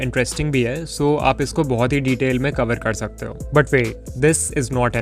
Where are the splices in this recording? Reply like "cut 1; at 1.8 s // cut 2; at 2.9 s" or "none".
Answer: none